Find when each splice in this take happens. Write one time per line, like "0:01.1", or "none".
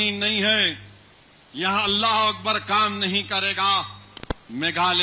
none